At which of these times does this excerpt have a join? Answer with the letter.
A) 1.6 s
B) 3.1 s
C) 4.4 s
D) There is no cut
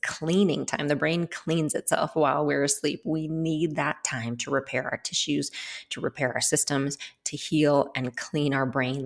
D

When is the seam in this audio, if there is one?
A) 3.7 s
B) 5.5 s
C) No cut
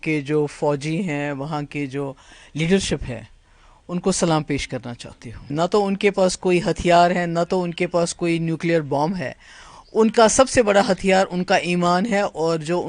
B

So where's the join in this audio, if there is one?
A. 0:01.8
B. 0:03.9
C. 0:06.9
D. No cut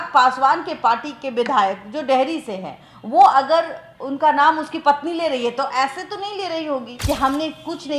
C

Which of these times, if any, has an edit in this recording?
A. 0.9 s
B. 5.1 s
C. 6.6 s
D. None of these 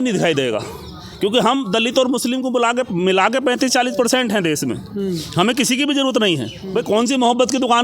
C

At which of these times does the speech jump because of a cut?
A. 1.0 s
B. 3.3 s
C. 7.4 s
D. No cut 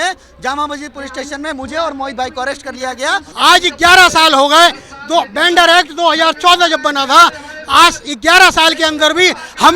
B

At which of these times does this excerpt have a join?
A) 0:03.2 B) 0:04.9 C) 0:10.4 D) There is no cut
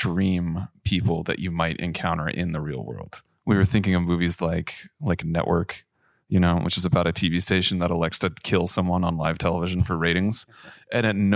A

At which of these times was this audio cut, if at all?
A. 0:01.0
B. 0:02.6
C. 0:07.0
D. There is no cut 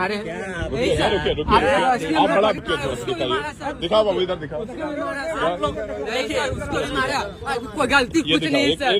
B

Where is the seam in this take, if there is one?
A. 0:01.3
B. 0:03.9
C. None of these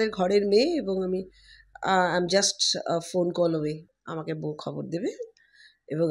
B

